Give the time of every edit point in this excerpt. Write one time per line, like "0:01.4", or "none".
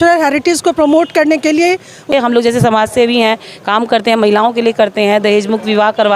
0:02.0

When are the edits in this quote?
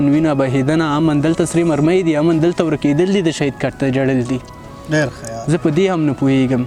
none

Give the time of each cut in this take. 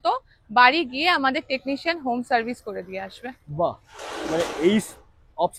none

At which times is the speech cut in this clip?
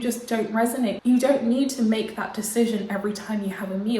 0:01.0

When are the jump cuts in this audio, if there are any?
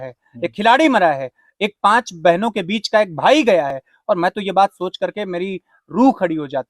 none

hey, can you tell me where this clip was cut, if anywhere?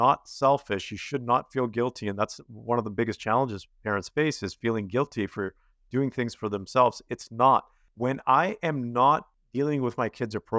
0:07.8
0:09.4

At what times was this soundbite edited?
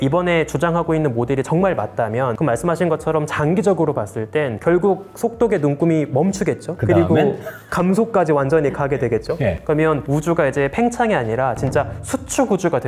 none

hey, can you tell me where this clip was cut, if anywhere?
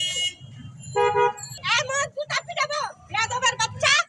0:01.5

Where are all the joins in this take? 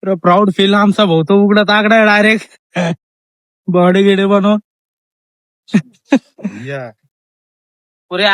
none

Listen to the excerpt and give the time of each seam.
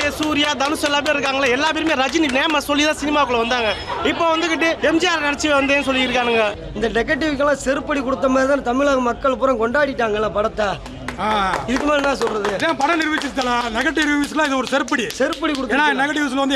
0:04.8
0:06.5

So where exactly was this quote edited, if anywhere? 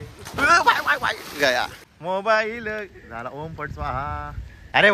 none

